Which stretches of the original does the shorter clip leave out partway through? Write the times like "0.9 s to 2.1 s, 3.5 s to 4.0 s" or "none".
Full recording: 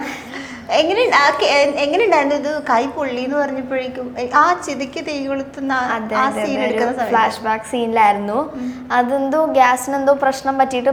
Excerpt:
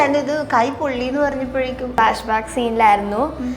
4.1 s to 7.1 s